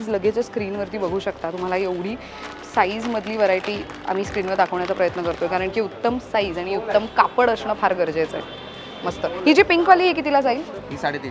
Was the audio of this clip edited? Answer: no; 0 cuts

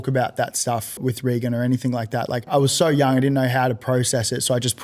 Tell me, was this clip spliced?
yes; 2 cuts; at 1.0 s, 2.5 s

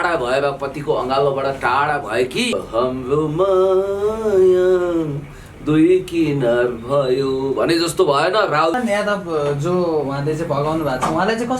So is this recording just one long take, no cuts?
no; 2 cuts; at 2.5 s, 8.8 s

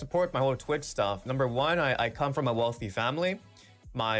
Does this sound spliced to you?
yes; 1 cut; at 1.2 s

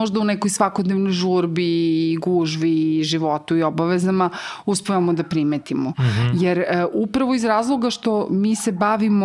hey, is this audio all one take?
yes; 0 cuts

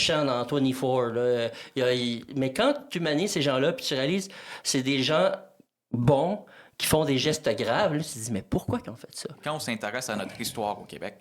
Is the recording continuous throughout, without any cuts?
no; 1 cut; at 9.4 s

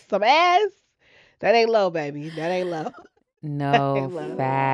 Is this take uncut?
yes; 0 cuts

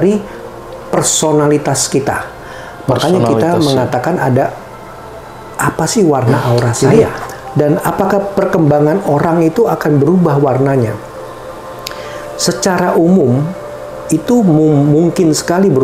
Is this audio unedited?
no; 1 cut; at 6.7 s

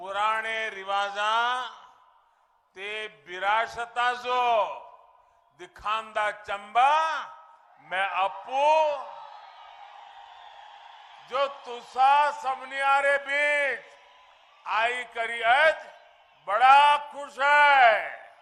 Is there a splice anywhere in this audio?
no; 0 cuts

